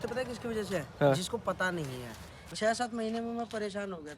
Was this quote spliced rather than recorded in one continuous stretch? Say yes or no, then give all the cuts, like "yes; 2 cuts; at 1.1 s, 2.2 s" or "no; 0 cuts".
yes; 1 cut; at 2.5 s